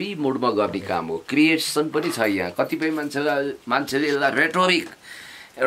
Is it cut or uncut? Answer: uncut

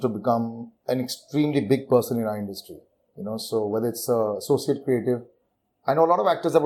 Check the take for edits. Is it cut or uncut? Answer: uncut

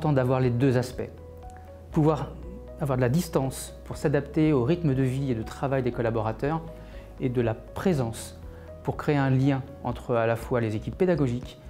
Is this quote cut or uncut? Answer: uncut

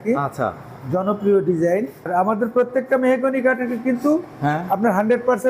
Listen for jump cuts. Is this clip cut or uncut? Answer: cut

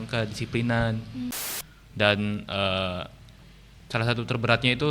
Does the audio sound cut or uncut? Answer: cut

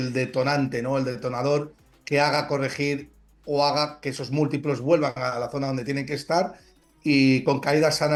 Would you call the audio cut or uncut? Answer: uncut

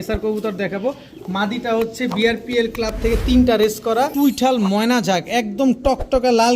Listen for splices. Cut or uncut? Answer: cut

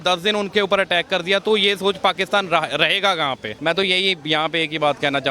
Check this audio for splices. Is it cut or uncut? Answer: cut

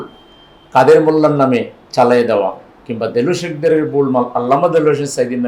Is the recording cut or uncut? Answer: uncut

